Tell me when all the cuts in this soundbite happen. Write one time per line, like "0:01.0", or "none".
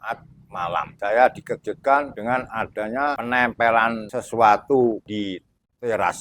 0:00.9
0:02.1
0:03.2
0:04.1
0:05.1